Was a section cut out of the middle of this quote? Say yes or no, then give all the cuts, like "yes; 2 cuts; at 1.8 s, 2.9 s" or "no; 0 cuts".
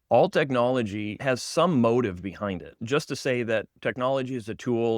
yes; 2 cuts; at 1.1 s, 2.8 s